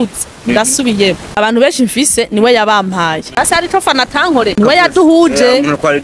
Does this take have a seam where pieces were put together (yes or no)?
yes